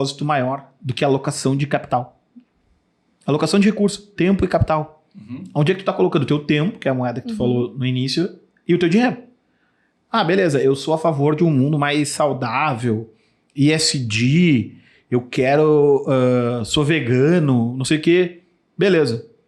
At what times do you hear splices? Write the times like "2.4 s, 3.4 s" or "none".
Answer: none